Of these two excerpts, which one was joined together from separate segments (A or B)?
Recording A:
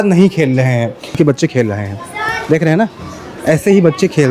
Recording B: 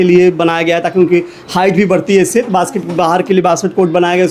A